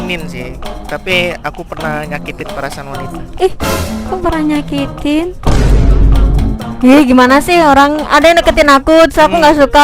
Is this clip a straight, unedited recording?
no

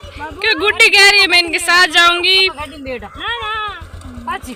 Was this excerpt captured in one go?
yes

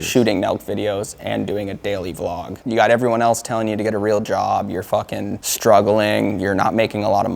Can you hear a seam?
yes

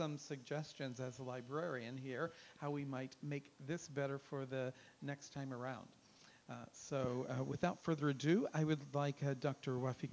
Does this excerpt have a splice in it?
yes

